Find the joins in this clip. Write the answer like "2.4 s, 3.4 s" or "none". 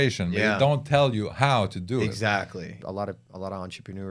2.8 s